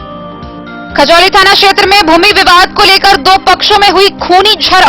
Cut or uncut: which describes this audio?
cut